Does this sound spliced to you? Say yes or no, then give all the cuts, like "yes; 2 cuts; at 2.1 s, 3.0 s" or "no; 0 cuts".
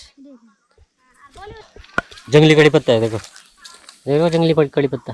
yes; 1 cut; at 1.8 s